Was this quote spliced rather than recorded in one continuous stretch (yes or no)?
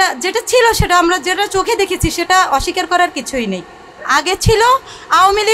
yes